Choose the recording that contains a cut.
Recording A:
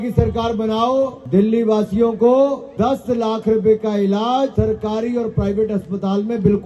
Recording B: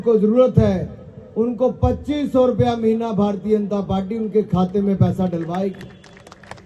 A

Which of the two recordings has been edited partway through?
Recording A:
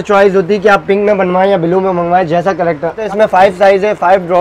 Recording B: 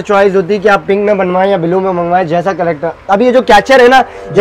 A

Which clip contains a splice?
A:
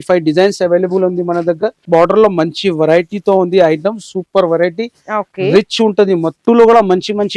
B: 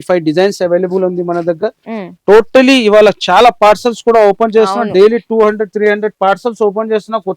A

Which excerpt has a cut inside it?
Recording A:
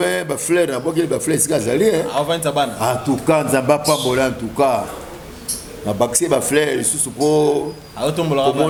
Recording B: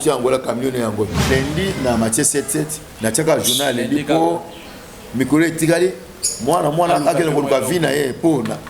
B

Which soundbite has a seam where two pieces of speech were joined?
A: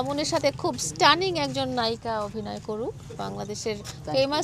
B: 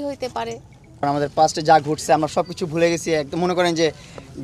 B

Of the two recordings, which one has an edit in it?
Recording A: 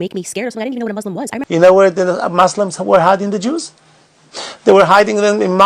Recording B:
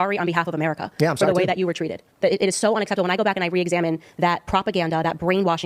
A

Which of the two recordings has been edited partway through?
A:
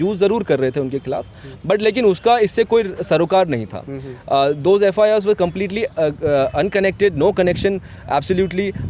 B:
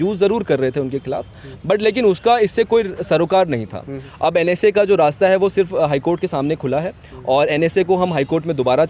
B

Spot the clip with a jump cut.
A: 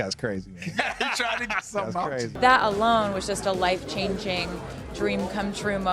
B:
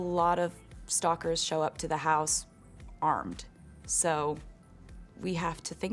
A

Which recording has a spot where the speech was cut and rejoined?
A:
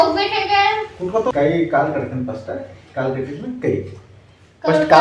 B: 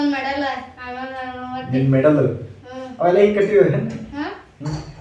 A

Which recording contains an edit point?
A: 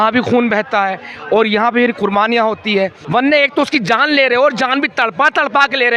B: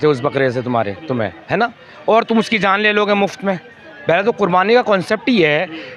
A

